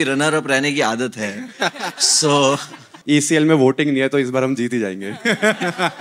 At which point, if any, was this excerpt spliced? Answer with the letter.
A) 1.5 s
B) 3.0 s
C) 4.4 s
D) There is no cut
B